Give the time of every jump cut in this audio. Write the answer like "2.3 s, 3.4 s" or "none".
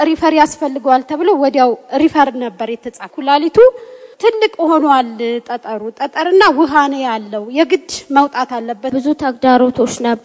3.1 s, 4.0 s, 8.9 s